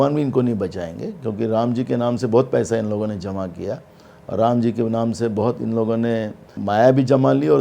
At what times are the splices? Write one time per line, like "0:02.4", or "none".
0:06.6